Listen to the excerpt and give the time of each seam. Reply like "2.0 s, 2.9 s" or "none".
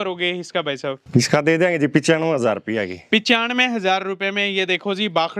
1.0 s